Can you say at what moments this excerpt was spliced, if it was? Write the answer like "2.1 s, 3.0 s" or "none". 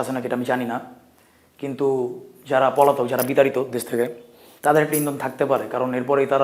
none